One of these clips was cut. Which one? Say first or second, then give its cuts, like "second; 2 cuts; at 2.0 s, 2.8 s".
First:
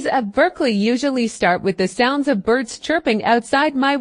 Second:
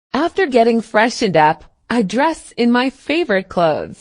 second; 1 cut; at 1.7 s